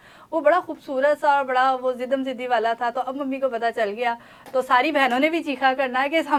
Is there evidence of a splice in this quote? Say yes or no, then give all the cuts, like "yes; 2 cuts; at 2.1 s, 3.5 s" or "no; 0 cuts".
no; 0 cuts